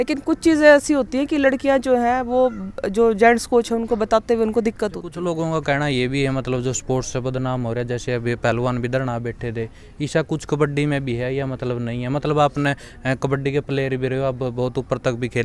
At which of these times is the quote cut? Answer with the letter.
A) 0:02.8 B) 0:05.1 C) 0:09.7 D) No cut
B